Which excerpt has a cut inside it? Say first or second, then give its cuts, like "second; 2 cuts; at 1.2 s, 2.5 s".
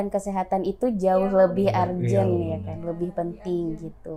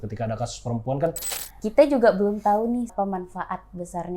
second; 2 cuts; at 1.3 s, 2.9 s